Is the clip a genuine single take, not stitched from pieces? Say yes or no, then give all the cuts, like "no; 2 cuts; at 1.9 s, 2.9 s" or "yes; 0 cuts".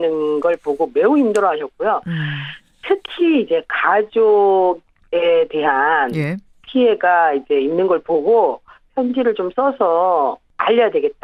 yes; 0 cuts